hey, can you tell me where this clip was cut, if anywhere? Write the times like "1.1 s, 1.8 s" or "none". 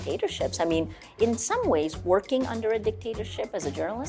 none